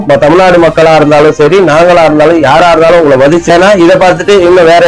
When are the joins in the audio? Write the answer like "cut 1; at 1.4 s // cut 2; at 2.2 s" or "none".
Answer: cut 1; at 3.5 s